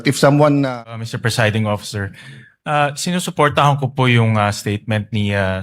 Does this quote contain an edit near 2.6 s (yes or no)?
no